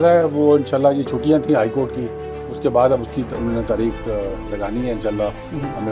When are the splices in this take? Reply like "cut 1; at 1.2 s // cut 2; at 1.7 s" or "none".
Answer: none